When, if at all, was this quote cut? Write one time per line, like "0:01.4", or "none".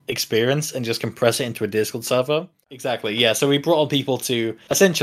0:02.6